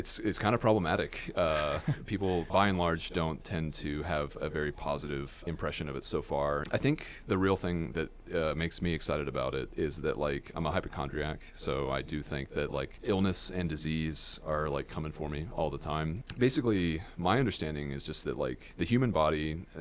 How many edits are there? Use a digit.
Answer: 6